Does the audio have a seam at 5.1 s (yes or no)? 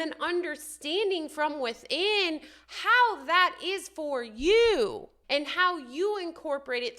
yes